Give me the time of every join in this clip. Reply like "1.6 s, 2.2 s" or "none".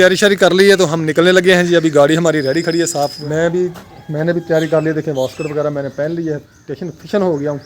3.2 s